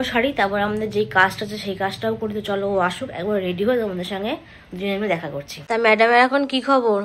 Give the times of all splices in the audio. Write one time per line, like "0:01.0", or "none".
0:05.5

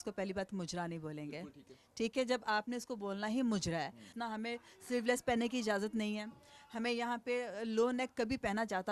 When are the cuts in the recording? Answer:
0:04.1

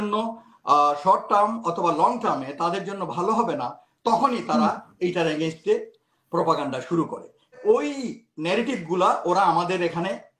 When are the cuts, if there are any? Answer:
0:07.6

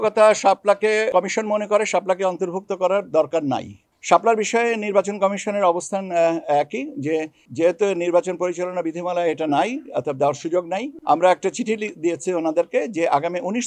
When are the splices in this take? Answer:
0:01.1
0:03.9

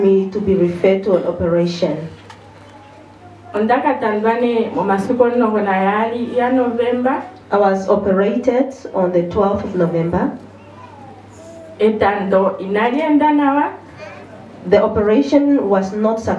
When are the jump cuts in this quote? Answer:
none

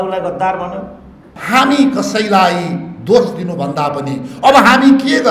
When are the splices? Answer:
0:01.3

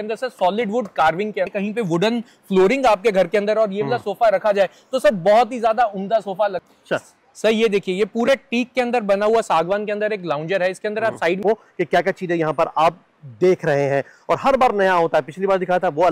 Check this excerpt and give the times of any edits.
0:01.5
0:06.6
0:11.4

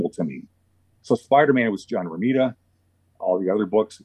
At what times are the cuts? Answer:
none

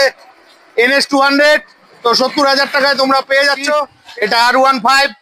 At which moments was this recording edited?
0:04.0

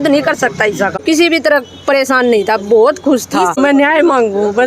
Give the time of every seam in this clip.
0:01.0
0:03.6

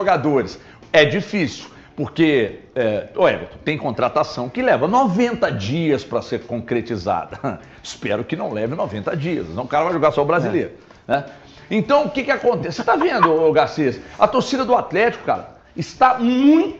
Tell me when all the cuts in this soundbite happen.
none

